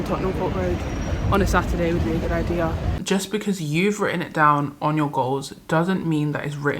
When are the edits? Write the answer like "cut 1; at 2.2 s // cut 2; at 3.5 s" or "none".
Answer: cut 1; at 2.9 s